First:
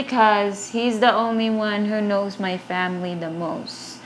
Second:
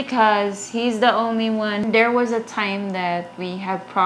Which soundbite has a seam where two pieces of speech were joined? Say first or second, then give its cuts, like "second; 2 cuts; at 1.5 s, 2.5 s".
second; 1 cut; at 1.8 s